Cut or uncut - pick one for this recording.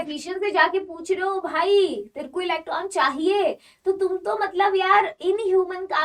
uncut